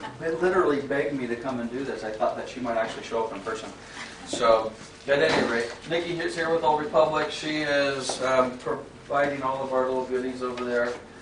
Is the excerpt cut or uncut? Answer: cut